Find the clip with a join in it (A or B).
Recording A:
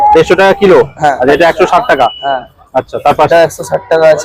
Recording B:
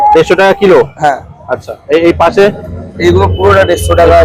A